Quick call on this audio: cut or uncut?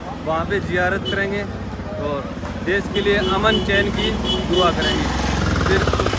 uncut